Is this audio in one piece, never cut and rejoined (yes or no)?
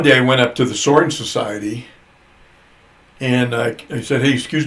yes